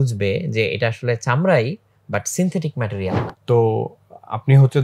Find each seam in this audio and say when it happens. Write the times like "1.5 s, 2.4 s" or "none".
3.3 s